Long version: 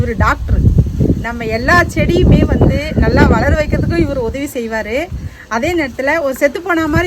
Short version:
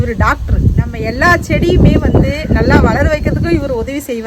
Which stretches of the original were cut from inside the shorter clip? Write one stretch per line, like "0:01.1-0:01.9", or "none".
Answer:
0:00.9-0:01.4